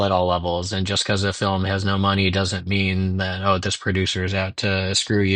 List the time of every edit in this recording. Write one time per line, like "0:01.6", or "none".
none

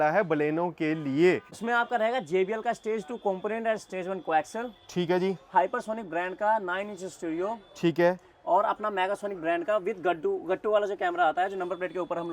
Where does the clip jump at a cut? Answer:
0:01.5

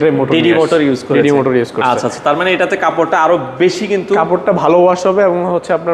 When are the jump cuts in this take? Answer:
none

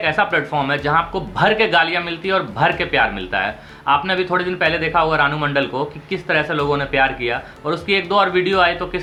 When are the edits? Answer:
none

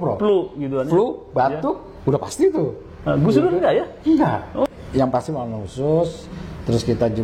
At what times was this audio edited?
0:04.7

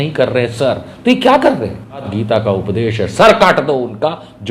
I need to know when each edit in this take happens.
0:02.1

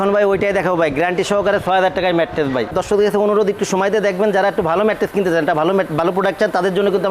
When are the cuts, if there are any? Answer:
0:02.7

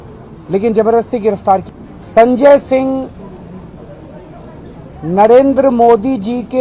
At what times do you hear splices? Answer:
0:01.7

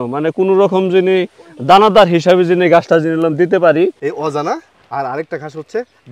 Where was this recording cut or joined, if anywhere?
0:04.0

